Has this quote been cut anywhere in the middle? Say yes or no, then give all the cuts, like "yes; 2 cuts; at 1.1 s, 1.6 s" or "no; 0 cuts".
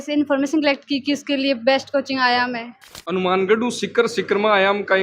yes; 1 cut; at 2.9 s